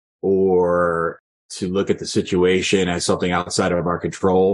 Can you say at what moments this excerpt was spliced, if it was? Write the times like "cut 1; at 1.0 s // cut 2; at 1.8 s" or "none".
cut 1; at 3.5 s

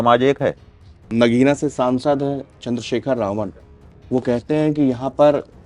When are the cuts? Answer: cut 1; at 1.0 s

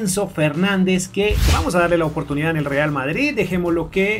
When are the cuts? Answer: cut 1; at 1.4 s

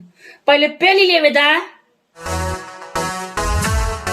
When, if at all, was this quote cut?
cut 1; at 2.2 s

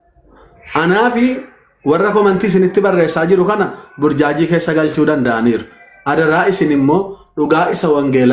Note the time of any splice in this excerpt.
none

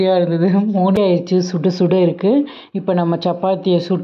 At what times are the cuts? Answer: cut 1; at 1.0 s

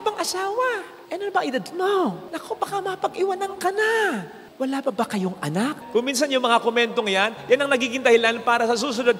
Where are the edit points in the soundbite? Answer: cut 1; at 4.4 s // cut 2; at 5.8 s

